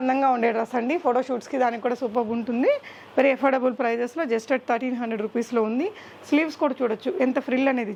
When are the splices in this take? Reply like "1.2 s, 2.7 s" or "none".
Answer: none